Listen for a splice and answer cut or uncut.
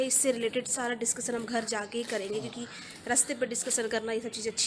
uncut